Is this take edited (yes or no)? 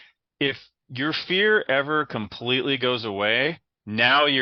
no